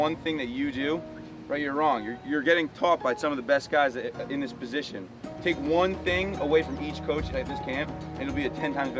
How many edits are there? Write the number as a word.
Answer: zero